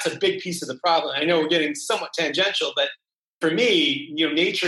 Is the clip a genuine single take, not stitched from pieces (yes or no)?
no